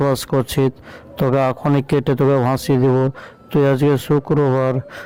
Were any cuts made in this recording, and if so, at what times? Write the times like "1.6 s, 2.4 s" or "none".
none